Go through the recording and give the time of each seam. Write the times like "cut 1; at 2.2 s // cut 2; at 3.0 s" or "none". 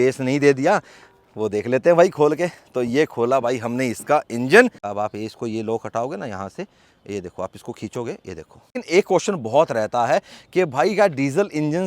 cut 1; at 4.8 s // cut 2; at 8.6 s

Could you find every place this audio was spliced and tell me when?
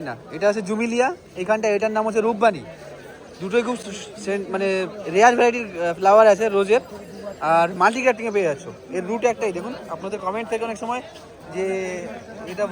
none

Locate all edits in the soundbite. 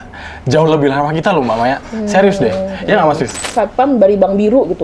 cut 1; at 3.4 s

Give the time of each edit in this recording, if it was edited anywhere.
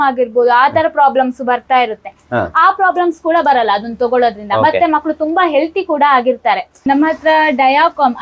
cut 1; at 6.9 s

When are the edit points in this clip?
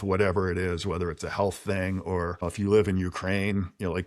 cut 1; at 2.4 s

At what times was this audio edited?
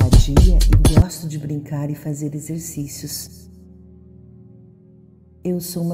cut 1; at 1.0 s

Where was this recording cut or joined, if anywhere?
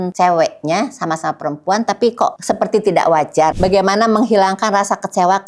cut 1; at 3.5 s

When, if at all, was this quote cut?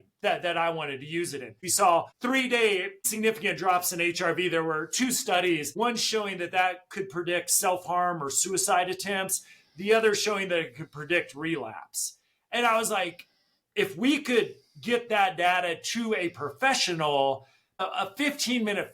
cut 1; at 1.5 s // cut 2; at 17.8 s

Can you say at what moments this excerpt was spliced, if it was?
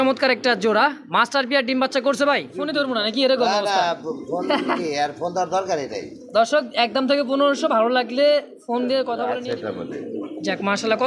cut 1; at 2.9 s // cut 2; at 9.1 s

